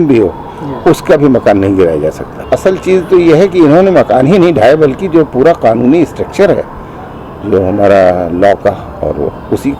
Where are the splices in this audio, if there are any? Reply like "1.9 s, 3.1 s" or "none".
2.4 s